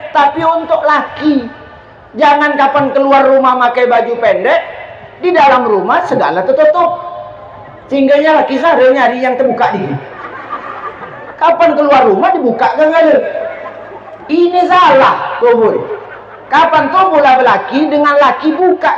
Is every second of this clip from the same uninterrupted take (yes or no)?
yes